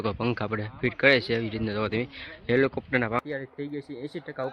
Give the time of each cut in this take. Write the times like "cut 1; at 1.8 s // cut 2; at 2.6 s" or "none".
cut 1; at 3.2 s